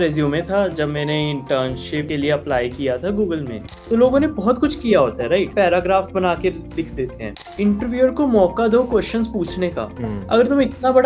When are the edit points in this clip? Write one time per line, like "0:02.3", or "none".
0:02.1
0:03.8
0:05.5
0:07.4